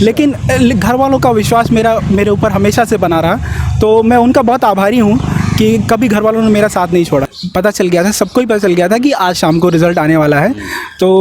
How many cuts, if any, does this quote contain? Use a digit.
1